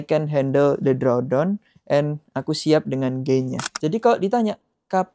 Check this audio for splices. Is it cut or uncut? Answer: cut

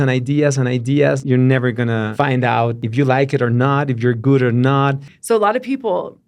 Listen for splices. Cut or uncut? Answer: cut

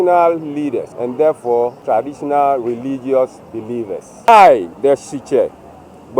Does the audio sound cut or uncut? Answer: cut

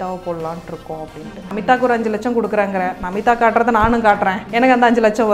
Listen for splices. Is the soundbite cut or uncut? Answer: cut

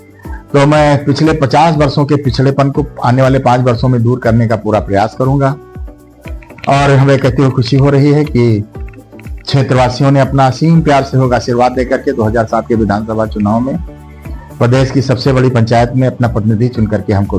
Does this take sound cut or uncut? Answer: uncut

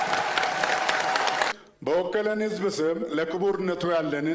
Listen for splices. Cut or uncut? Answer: cut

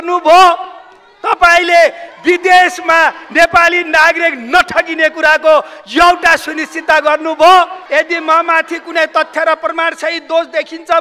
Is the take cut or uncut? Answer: cut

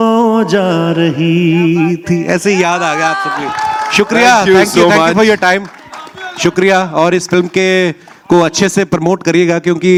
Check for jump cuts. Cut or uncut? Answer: uncut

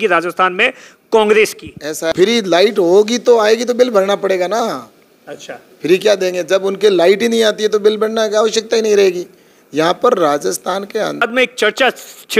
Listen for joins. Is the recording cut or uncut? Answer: cut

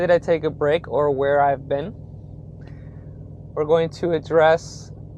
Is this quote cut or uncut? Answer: uncut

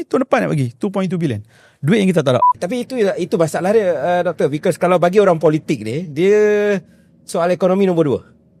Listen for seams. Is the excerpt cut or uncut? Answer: cut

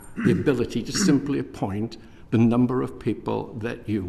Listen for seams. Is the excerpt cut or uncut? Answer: uncut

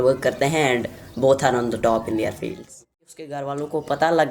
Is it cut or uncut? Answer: cut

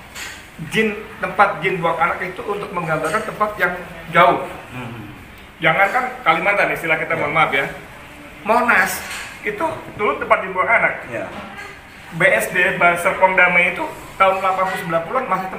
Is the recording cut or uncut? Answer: uncut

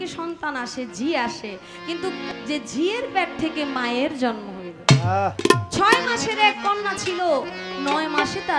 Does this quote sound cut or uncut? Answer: cut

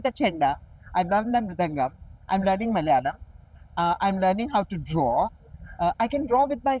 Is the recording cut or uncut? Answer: uncut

